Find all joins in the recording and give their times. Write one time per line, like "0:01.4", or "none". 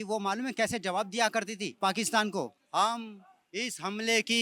0:01.7
0:02.6